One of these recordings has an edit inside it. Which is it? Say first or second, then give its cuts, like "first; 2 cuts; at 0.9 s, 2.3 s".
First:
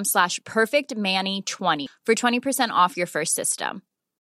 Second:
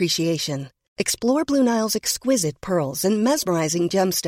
first; 1 cut; at 1.9 s